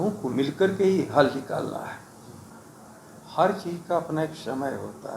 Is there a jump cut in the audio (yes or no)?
no